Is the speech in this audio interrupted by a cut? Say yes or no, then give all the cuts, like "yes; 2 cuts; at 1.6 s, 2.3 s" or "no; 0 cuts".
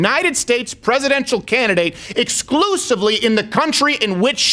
no; 0 cuts